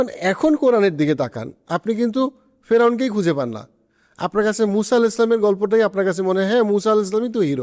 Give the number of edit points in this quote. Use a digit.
0